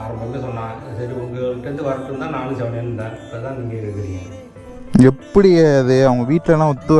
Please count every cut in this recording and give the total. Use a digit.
1